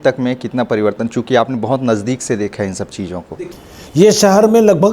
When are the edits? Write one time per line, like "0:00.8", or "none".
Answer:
0:03.4